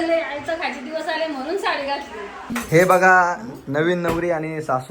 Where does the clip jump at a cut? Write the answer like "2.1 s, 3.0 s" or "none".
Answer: 2.5 s